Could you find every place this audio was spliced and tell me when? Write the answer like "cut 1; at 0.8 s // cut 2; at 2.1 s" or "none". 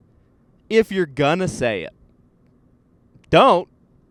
none